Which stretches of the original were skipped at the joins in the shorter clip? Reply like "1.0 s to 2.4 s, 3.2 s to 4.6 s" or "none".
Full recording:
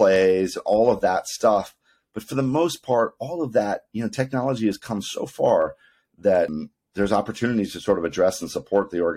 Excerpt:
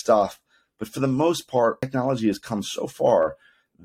3.2 s to 4.2 s